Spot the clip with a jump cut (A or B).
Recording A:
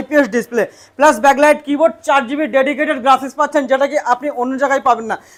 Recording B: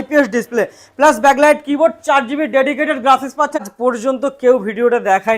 B